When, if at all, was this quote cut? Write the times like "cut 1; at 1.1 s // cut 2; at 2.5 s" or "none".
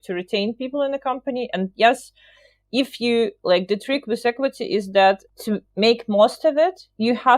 cut 1; at 5.2 s